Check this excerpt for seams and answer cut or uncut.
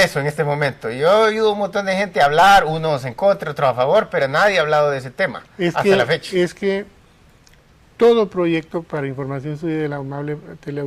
cut